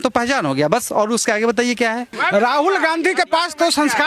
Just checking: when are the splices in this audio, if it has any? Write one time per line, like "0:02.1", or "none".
0:02.2